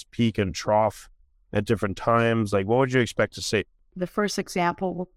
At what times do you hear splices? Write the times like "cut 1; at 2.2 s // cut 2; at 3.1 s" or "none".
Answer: cut 1; at 3.9 s